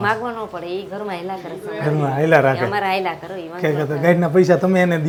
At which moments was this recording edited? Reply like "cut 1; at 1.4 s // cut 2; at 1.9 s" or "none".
none